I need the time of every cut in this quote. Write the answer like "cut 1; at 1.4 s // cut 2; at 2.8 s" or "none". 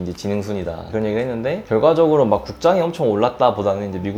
none